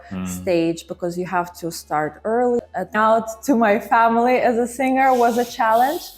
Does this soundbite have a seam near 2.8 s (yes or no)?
yes